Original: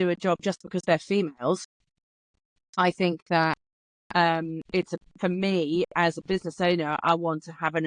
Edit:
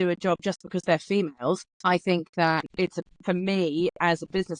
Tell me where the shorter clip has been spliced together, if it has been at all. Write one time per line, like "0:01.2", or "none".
0:01.7
0:02.7